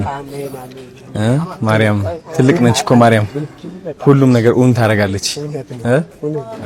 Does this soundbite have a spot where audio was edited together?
no; 0 cuts

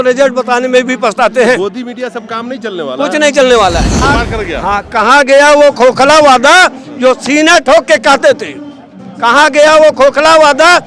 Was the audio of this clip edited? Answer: yes; 1 cut; at 4.0 s

